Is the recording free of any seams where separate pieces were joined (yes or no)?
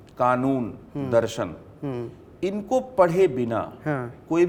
yes